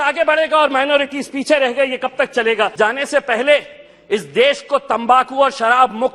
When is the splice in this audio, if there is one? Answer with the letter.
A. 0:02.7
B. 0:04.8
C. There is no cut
A